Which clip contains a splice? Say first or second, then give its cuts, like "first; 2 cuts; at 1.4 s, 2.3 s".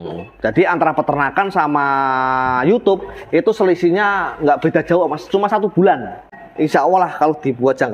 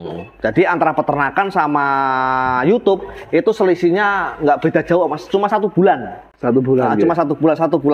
first; 1 cut; at 6.3 s